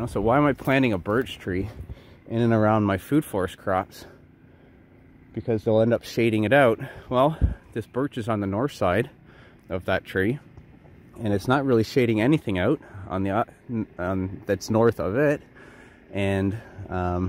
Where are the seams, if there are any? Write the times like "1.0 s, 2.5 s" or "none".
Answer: none